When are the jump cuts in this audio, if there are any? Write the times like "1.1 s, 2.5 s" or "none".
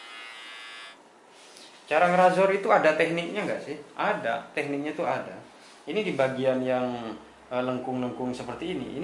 0.9 s